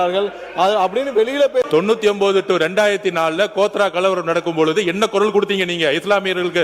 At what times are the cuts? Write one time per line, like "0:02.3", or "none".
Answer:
0:01.6